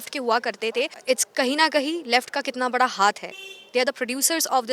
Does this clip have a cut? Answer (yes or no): yes